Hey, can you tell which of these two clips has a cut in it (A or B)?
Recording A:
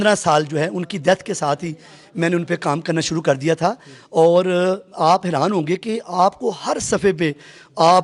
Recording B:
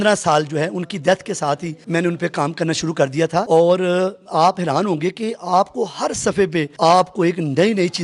B